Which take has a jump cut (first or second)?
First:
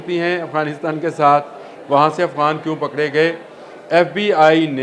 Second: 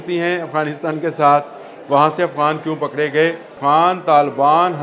second